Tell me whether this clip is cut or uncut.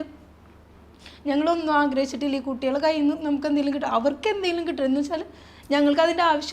uncut